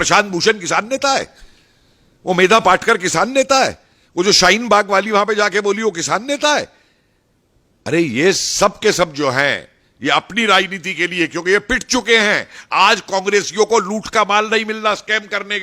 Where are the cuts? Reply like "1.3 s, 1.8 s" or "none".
none